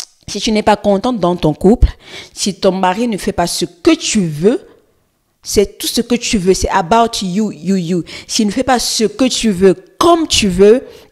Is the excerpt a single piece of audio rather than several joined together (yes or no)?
yes